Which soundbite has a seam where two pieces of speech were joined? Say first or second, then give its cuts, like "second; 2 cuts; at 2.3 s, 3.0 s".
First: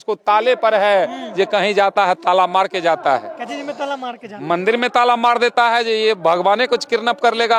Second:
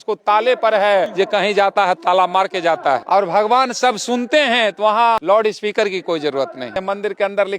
second; 4 cuts; at 1.1 s, 3.0 s, 5.2 s, 6.8 s